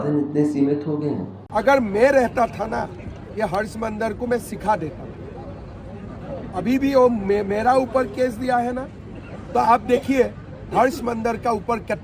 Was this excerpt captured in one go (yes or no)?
no